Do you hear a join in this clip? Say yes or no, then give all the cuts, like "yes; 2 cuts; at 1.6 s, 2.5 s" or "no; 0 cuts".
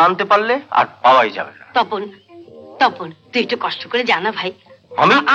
no; 0 cuts